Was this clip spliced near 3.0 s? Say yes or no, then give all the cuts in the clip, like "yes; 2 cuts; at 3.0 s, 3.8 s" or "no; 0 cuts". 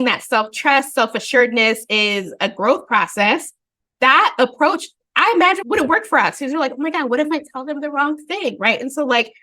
no; 1 cut; at 5.6 s